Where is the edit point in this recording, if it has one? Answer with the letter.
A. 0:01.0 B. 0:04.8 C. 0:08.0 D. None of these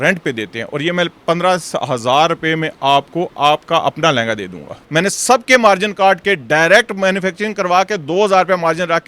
B